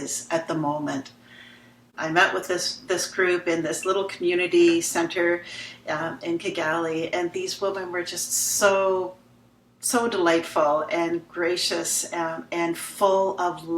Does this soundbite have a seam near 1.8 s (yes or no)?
yes